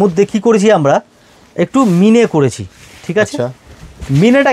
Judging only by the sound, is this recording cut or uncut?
uncut